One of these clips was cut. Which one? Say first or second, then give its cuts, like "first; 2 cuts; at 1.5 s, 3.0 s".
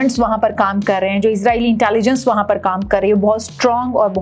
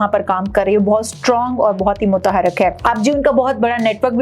second; 1 cut; at 2.8 s